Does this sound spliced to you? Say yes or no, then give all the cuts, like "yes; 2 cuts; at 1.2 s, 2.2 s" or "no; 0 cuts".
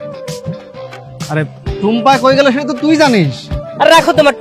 no; 0 cuts